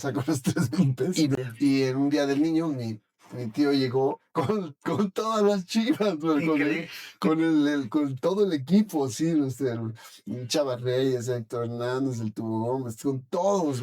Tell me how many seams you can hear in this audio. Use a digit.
1